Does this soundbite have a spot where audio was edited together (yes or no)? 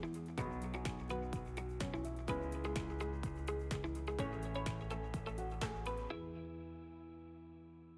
no